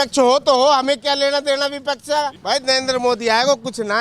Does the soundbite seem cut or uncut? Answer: cut